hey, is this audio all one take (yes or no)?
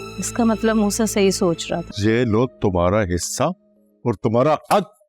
no